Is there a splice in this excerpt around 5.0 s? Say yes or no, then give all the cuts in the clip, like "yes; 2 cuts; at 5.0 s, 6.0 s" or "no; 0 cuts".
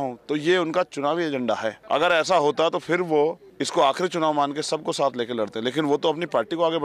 no; 2 cuts; at 1.7 s, 3.5 s